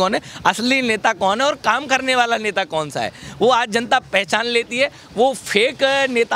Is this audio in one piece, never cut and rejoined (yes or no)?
yes